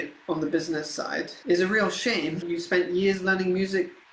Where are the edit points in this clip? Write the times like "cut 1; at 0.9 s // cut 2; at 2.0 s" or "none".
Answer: cut 1; at 1.3 s // cut 2; at 2.4 s